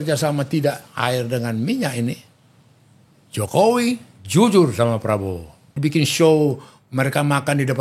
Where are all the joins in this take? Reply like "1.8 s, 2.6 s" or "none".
5.6 s